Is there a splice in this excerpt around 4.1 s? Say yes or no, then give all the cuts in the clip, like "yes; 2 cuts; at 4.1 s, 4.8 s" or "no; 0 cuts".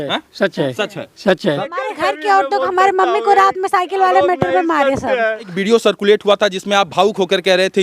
no; 2 cuts; at 1.6 s, 5.5 s